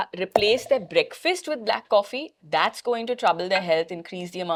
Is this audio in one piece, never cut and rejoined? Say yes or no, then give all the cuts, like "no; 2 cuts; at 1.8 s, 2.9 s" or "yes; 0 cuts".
yes; 0 cuts